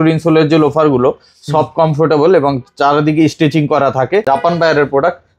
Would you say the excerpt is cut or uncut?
cut